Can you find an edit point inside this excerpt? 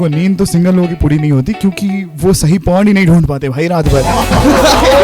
yes; 1 cut; at 0.9 s

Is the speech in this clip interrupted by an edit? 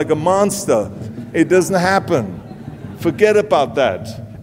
yes; 1 cut; at 1.0 s

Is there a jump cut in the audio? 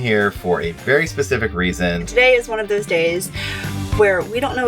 yes; 1 cut; at 2.0 s

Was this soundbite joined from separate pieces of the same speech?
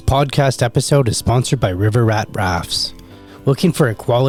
no; 0 cuts

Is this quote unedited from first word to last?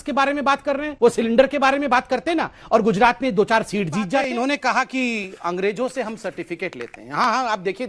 no; 1 cut; at 4.2 s

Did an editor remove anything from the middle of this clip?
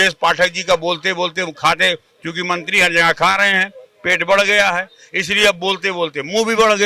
no; 0 cuts

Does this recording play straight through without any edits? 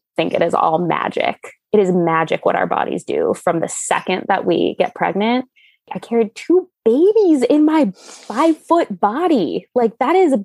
no; 1 cut; at 6.0 s

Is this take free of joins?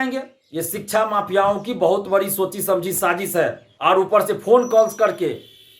no; 1 cut; at 3.6 s

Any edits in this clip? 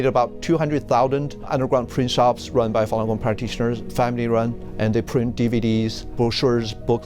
yes; 3 cuts; at 1.5 s, 4.6 s, 6.1 s

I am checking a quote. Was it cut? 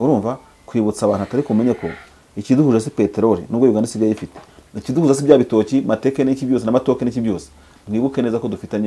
no; 0 cuts

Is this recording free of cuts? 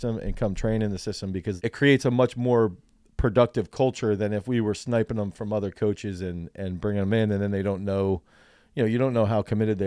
no; 1 cut; at 1.6 s

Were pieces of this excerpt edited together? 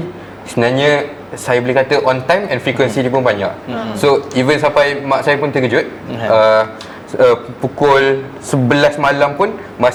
no; 0 cuts

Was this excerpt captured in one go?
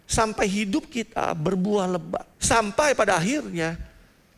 no; 1 cut; at 2.3 s

